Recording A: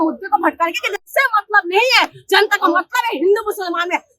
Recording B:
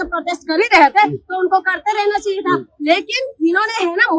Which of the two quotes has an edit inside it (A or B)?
A